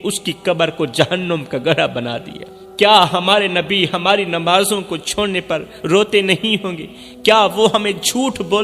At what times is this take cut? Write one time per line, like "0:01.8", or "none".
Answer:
0:02.6